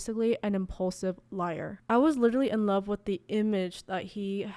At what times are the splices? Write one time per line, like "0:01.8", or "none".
0:01.8